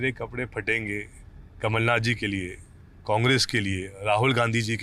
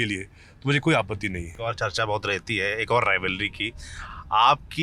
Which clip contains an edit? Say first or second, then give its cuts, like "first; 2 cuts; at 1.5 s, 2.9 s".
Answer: second; 1 cut; at 1.5 s